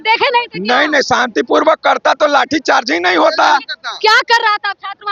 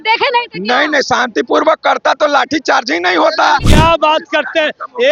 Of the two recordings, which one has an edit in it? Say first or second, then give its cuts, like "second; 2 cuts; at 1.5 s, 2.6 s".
second; 1 cut; at 3.7 s